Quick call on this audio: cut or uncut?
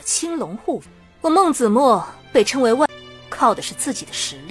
uncut